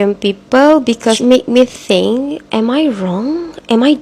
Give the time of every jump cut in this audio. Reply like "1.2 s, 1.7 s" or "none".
1.2 s